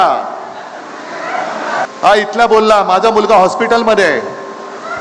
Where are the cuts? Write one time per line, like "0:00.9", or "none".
0:01.9